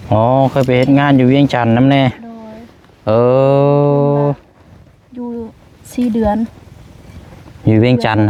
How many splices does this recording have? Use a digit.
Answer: 0